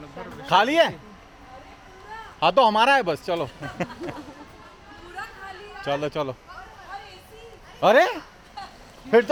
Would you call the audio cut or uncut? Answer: uncut